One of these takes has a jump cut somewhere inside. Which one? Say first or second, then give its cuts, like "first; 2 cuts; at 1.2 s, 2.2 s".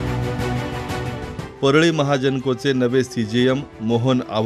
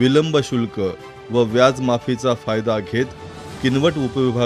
first; 1 cut; at 1.1 s